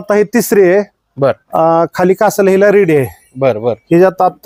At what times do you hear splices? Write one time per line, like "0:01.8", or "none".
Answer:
none